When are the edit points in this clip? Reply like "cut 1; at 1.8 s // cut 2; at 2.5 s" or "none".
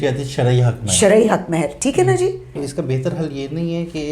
cut 1; at 2.6 s